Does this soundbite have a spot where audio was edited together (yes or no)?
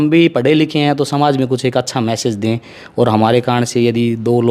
no